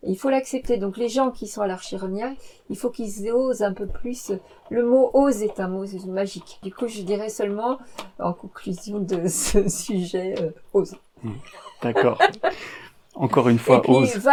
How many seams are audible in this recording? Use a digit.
0